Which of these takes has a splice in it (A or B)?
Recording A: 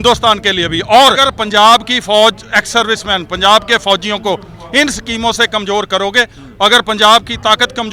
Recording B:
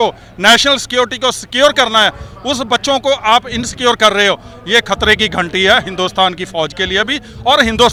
A